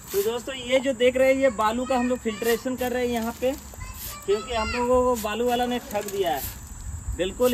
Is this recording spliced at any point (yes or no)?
no